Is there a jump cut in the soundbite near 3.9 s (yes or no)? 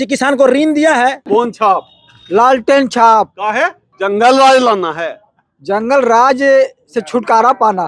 yes